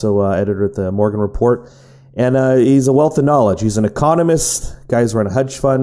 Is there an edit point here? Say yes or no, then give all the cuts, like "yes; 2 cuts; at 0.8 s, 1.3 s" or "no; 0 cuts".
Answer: no; 0 cuts